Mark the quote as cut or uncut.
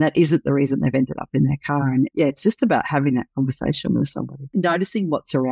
cut